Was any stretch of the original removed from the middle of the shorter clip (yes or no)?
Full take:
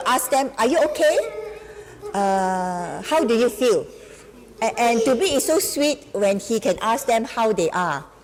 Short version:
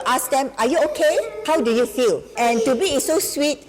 yes